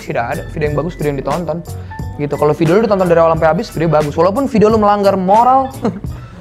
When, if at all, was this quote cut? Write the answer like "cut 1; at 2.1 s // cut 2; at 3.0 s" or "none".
none